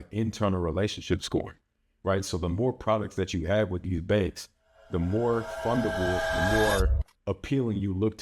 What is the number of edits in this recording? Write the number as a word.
one